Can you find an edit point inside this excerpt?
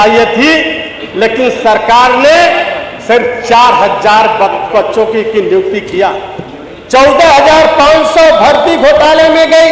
no; 0 cuts

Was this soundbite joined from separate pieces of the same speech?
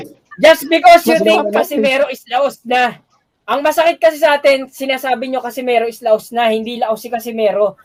no; 0 cuts

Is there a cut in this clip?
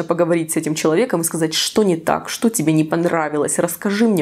no; 0 cuts

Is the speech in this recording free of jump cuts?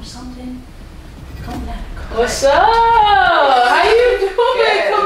no; 1 cut; at 1.9 s

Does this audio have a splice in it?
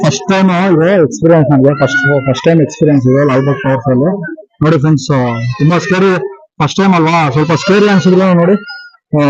no; 0 cuts

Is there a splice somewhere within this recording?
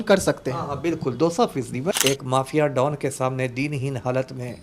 yes; 1 cut; at 2.0 s

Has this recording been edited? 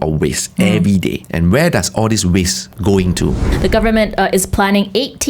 yes; 3 cuts; at 1.2 s, 2.6 s, 3.5 s

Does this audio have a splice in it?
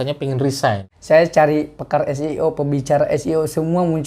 yes; 1 cut; at 0.9 s

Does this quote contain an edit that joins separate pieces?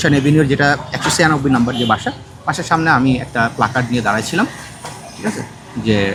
no; 0 cuts

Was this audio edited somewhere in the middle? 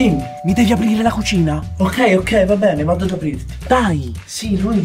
yes; 1 cut; at 3.5 s

